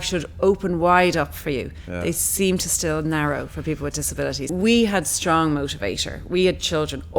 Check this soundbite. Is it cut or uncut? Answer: cut